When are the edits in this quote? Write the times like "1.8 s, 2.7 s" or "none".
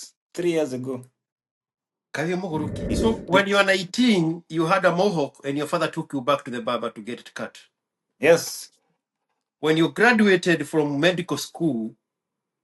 2.9 s